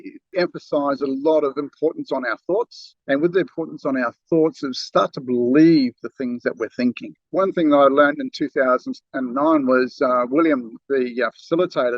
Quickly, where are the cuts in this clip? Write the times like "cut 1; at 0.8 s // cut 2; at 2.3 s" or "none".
cut 1; at 7.2 s